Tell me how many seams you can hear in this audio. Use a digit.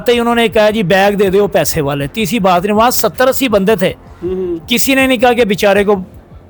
0